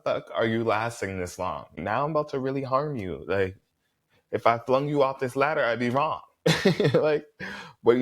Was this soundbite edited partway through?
yes; 1 cut; at 1.8 s

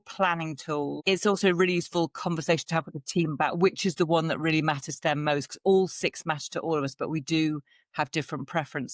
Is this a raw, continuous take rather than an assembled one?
no; 1 cut; at 1.0 s

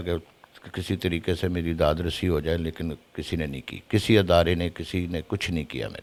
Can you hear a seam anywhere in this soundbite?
no; 0 cuts

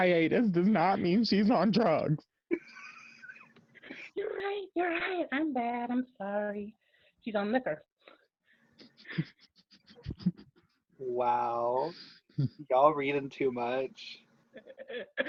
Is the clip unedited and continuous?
yes; 0 cuts

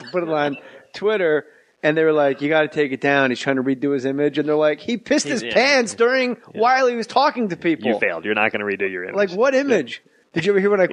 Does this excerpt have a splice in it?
no; 0 cuts

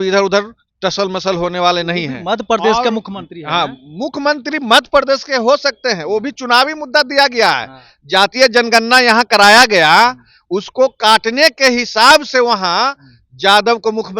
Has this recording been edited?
no; 0 cuts

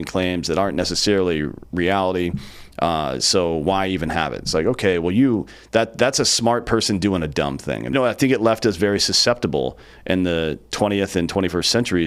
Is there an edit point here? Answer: yes; 1 cut; at 7.9 s

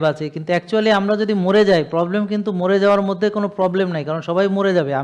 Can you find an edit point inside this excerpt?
no; 0 cuts

